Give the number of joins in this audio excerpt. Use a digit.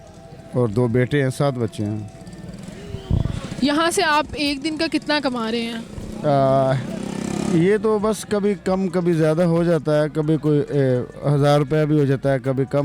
0